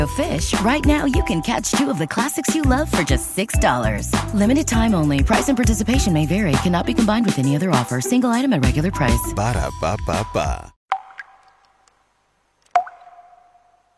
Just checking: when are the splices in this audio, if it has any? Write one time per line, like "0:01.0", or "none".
0:10.7